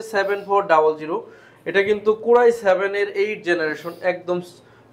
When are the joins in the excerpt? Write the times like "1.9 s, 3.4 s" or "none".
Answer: none